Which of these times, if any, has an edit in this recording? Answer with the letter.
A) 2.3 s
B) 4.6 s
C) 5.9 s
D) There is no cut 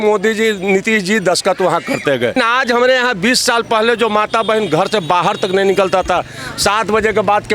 A